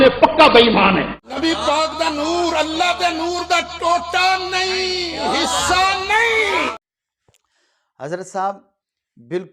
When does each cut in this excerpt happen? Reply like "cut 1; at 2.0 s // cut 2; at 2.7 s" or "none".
none